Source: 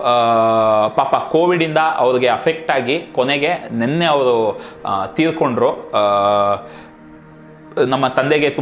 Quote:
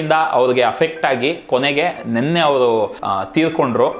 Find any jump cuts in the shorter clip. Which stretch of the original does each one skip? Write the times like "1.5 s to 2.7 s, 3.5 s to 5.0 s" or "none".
4.7 s to 4.8 s